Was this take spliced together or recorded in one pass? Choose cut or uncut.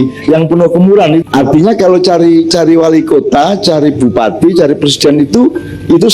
cut